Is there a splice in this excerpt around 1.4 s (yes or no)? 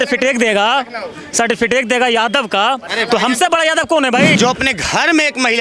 no